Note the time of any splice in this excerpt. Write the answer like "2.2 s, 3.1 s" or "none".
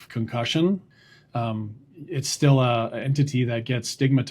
1.0 s